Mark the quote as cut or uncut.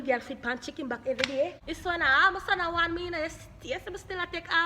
cut